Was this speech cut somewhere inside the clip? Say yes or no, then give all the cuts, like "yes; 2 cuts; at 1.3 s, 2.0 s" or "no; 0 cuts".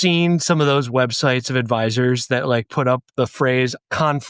no; 0 cuts